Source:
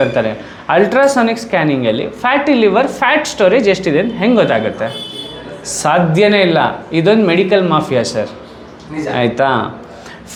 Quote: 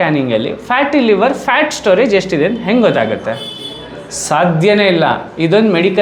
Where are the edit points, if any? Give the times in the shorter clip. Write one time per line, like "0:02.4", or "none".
none